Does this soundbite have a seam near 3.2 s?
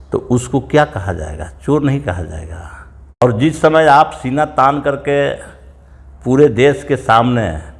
yes; 1 cut; at 3.2 s

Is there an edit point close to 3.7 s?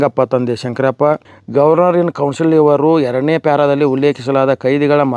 no; 1 cut; at 1.3 s

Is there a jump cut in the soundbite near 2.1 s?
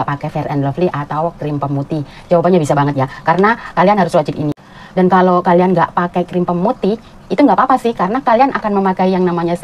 no; 1 cut; at 4.6 s

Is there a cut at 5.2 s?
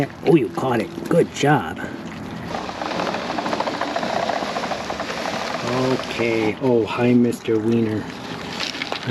no; 1 cut; at 2.5 s

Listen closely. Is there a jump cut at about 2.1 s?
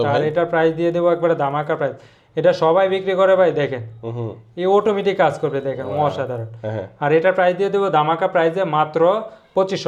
no; 0 cuts

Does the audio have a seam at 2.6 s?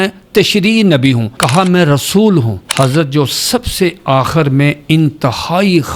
yes; 2 cuts; at 1.4 s, 2.6 s

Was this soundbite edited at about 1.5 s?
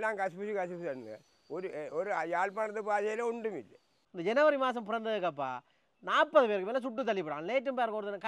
no; 1 cut; at 4.1 s

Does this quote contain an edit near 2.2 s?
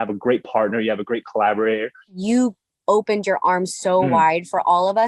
yes; 1 cut; at 2.2 s

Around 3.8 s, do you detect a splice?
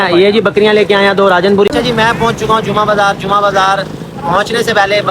no; 1 cut; at 1.7 s

